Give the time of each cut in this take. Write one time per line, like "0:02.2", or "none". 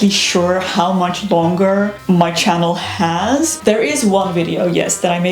0:02.0
0:03.5